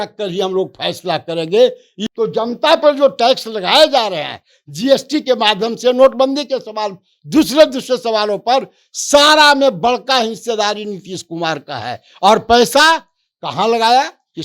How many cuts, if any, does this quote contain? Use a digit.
1